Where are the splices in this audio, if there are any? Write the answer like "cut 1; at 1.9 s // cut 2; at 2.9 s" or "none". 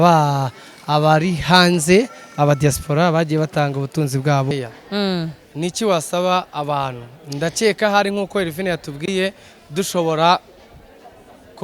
cut 1; at 4.5 s